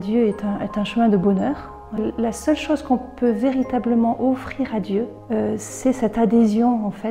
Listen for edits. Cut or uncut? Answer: cut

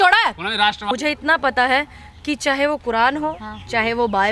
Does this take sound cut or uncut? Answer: cut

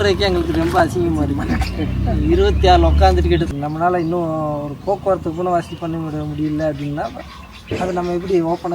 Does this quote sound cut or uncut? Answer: cut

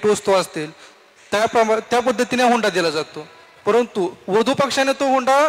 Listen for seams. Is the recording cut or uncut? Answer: uncut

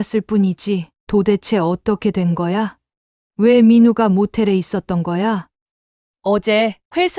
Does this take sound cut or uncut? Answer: cut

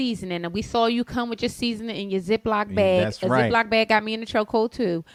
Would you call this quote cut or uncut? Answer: uncut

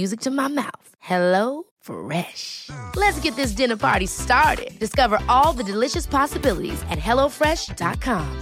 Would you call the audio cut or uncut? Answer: uncut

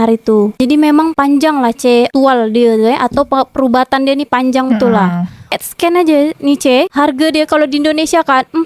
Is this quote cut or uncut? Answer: cut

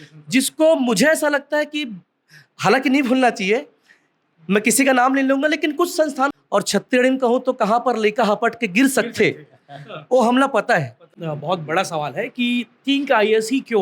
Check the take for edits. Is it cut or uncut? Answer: cut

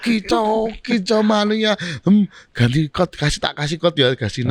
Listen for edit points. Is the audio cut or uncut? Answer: uncut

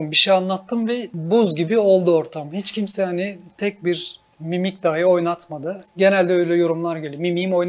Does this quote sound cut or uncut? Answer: cut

